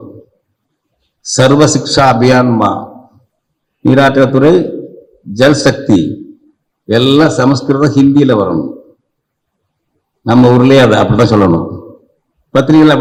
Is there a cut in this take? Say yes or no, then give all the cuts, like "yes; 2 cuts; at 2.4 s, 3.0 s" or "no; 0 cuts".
no; 0 cuts